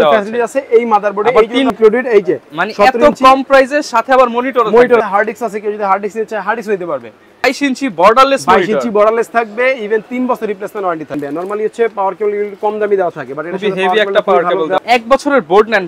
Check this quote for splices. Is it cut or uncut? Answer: cut